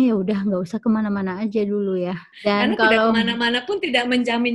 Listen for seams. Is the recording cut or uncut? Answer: cut